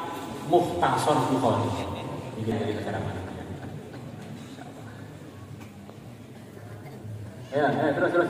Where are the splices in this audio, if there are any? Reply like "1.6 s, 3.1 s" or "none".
2.5 s